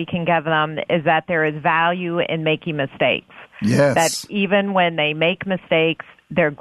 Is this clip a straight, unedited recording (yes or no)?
yes